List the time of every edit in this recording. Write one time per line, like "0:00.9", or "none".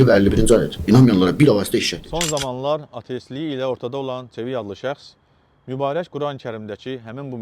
0:02.0